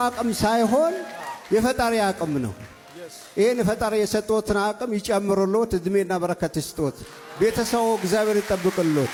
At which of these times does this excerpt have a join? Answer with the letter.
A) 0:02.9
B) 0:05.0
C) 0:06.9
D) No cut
D